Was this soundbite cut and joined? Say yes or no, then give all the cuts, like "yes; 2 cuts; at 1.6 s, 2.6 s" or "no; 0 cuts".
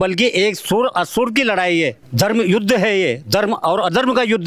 no; 0 cuts